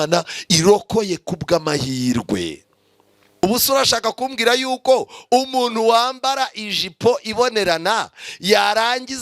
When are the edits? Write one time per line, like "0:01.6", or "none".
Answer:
0:03.4